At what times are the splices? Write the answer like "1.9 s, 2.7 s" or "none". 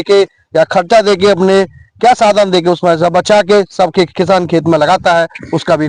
none